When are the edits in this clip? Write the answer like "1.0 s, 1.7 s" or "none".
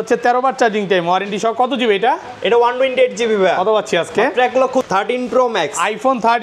4.9 s